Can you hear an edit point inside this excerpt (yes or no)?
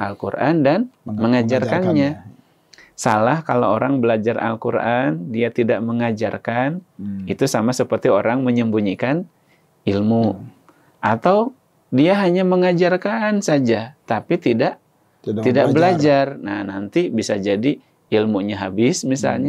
no